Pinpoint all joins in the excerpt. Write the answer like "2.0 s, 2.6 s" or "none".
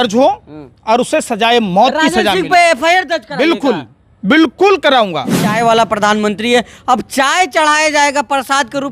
5.4 s